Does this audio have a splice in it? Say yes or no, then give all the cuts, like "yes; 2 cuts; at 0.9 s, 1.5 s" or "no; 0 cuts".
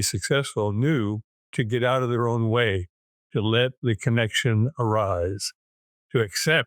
yes; 1 cut; at 1.5 s